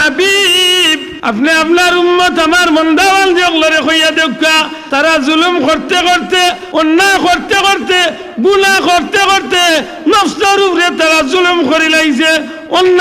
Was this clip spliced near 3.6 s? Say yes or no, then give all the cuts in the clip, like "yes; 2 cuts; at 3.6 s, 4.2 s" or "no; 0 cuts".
no; 3 cuts; at 1.1 s, 4.8 s, 6.6 s